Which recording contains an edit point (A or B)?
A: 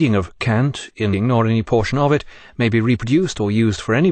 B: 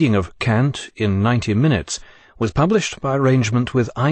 B